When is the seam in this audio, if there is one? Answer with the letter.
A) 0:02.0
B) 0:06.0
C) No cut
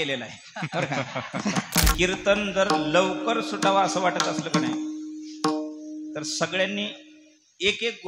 A